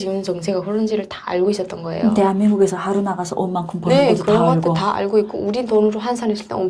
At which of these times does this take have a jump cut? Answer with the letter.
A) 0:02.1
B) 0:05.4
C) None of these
C